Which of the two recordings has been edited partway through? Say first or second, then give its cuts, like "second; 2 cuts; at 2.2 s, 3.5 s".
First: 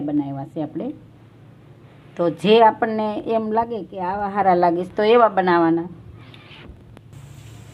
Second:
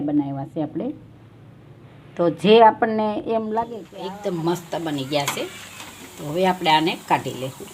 second; 1 cut; at 3.9 s